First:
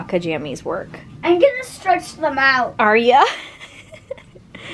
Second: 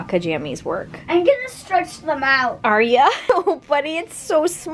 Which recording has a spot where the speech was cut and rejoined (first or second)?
second